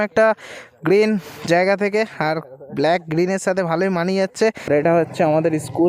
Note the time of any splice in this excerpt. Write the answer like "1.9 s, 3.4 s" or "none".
4.6 s